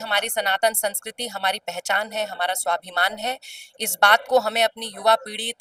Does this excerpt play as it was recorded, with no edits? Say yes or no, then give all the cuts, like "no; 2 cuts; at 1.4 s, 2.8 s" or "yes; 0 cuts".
yes; 0 cuts